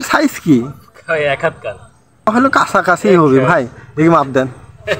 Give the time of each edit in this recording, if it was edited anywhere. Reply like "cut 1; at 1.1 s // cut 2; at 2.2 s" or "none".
cut 1; at 2.3 s